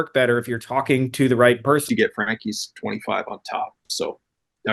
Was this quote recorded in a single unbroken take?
no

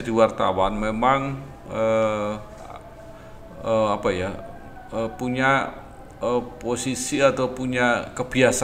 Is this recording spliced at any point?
no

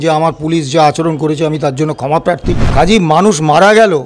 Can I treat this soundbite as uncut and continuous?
no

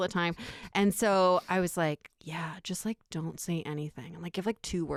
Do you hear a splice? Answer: no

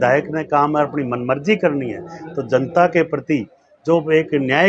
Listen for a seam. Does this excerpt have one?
no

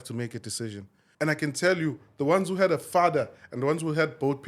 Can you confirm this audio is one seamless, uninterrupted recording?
no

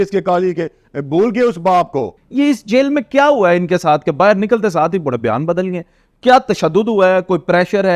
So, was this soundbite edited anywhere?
yes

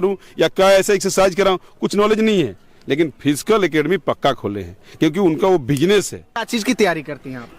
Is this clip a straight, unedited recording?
no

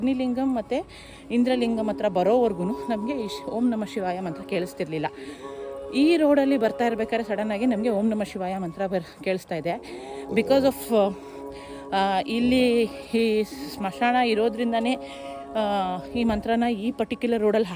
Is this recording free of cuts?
yes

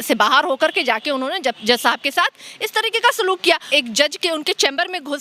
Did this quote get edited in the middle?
yes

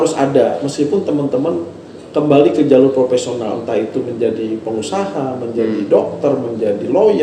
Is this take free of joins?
yes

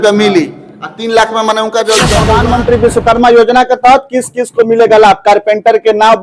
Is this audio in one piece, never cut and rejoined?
no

